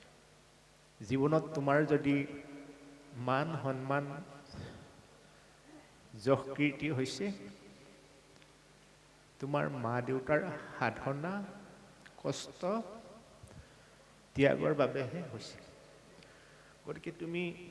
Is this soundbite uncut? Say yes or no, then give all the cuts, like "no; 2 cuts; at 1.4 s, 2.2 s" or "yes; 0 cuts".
yes; 0 cuts